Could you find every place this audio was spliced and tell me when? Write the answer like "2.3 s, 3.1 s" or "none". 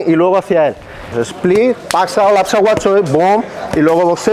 1.1 s

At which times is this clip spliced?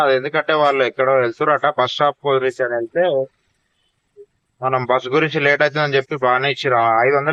none

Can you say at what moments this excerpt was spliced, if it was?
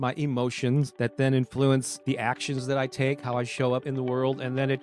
0.9 s, 1.9 s, 3.8 s

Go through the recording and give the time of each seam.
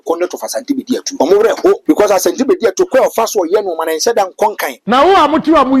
1.1 s, 1.8 s, 4.7 s

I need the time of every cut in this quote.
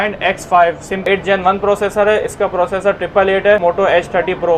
1.1 s, 3.6 s

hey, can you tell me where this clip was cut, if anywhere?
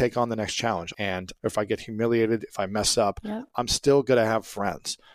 1.2 s

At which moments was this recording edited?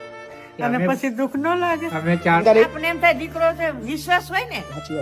2.4 s

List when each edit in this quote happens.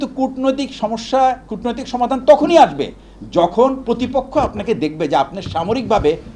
none

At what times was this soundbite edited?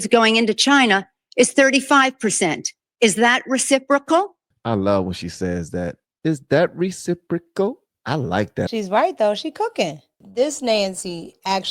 10.2 s

